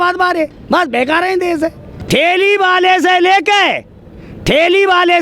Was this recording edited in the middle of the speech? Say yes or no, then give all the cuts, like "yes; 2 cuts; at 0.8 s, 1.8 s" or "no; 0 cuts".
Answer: yes; 1 cut; at 1.9 s